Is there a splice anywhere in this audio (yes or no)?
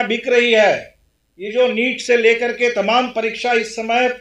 no